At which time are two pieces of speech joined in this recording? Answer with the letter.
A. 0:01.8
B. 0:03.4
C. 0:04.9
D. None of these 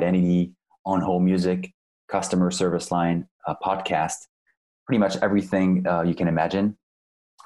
D